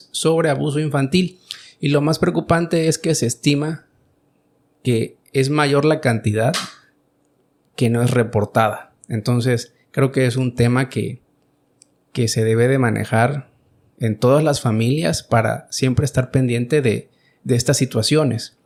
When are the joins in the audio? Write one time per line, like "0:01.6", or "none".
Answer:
none